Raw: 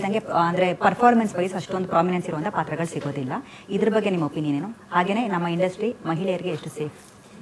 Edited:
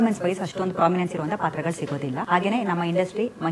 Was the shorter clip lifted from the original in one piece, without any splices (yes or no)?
no